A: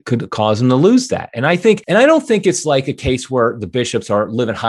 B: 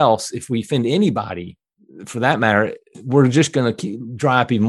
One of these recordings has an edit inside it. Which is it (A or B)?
A